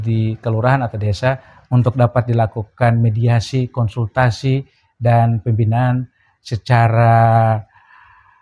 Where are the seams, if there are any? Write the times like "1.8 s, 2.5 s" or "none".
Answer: none